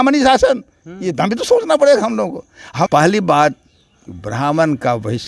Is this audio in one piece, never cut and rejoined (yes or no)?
no